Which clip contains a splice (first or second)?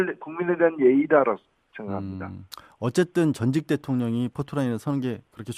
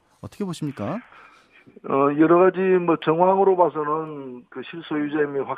second